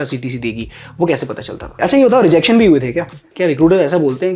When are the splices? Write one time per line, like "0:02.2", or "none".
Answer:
0:01.7
0:03.3